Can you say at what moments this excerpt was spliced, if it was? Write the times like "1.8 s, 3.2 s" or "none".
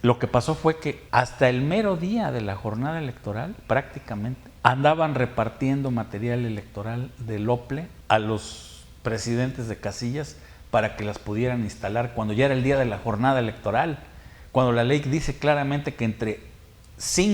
1.0 s, 4.5 s, 7.9 s